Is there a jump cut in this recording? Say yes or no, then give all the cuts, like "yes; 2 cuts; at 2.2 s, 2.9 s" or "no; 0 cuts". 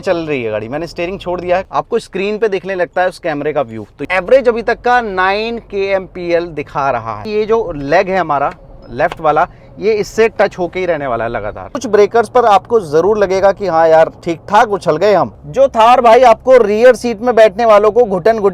yes; 5 cuts; at 1.7 s, 4.0 s, 7.2 s, 11.6 s, 15.3 s